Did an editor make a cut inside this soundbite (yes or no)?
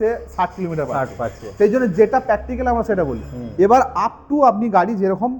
no